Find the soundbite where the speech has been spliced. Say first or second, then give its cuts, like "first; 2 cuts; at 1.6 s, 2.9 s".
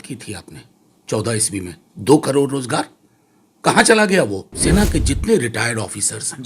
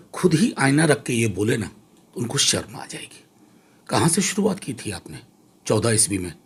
first; 1 cut; at 4.5 s